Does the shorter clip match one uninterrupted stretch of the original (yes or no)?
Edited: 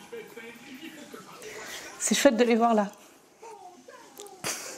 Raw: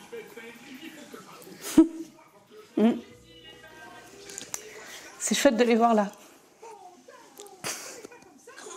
no